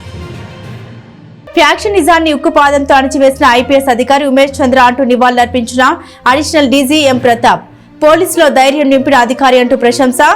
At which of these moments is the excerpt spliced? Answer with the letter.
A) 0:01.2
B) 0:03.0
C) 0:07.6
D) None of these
A